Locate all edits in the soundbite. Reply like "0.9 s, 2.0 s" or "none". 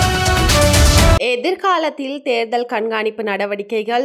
1.1 s